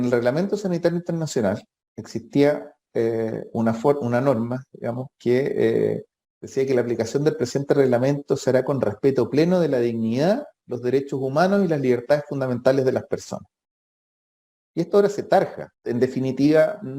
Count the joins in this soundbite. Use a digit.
1